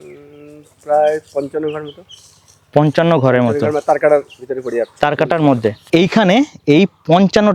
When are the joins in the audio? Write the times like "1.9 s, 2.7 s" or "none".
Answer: none